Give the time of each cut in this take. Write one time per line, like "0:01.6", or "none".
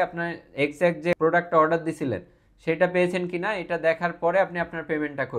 0:01.1

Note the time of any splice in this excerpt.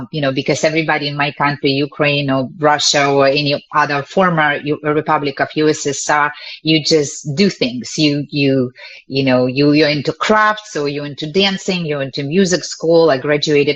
none

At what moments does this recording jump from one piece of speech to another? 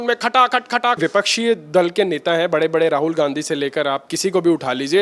0:01.0

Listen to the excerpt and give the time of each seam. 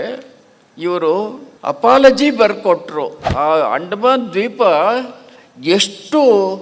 0:01.5
0:03.3

